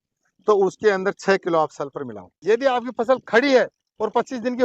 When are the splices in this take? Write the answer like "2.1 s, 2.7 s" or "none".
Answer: 2.3 s

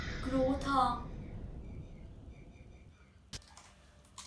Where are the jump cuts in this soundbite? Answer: 3.3 s

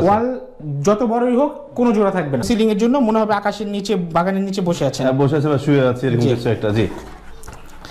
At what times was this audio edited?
2.4 s

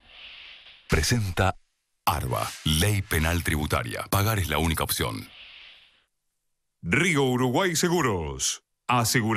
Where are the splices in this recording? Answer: 0.9 s

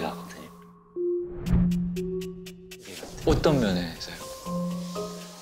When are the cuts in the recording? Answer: 3.0 s

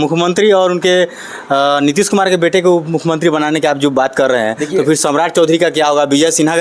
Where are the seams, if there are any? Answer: none

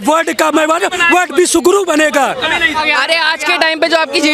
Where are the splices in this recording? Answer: 2.8 s

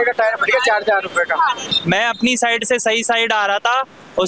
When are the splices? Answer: 1.7 s

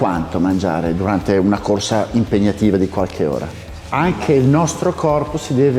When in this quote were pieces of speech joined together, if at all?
3.7 s

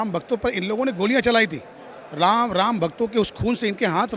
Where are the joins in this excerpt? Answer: none

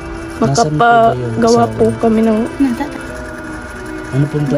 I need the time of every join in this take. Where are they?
3.0 s

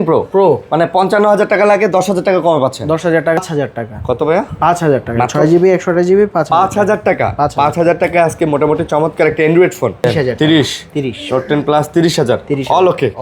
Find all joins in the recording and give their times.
3.4 s, 10.0 s

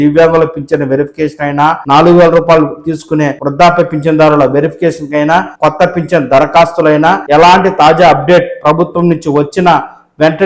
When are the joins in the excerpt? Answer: 1.8 s, 3.4 s, 5.5 s, 7.2 s

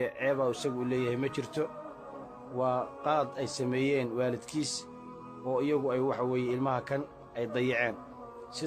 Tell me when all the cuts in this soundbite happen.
3.4 s

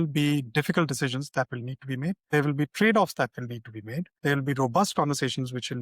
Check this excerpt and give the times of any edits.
2.2 s

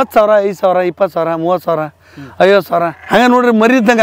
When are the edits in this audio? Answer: 3.0 s

